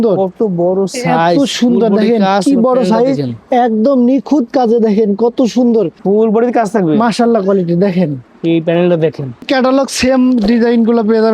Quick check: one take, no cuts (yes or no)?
no